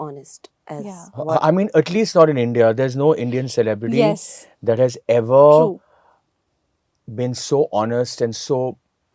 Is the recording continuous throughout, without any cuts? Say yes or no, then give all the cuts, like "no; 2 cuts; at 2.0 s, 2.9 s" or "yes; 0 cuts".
yes; 0 cuts